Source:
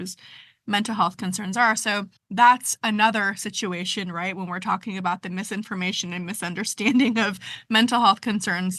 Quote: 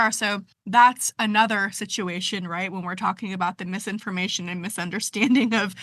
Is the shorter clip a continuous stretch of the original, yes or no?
yes